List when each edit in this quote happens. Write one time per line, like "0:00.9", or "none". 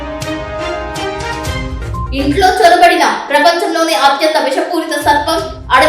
0:02.1